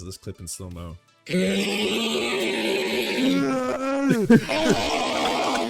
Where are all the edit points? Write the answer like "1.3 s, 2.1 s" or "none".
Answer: 1.1 s